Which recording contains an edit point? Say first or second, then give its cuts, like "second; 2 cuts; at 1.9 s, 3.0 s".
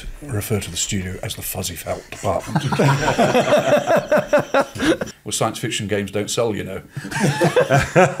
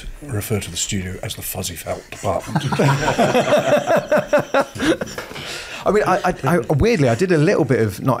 first; 1 cut; at 5.2 s